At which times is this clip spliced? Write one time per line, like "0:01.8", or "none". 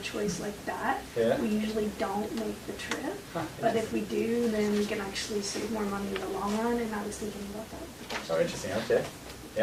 none